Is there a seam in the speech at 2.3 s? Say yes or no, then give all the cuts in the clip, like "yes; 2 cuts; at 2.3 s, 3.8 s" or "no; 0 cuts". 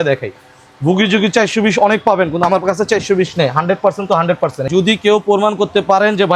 no; 1 cut; at 4.7 s